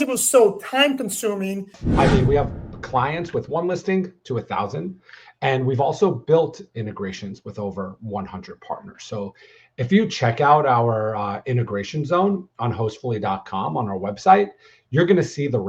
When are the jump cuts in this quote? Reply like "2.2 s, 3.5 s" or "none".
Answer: 1.8 s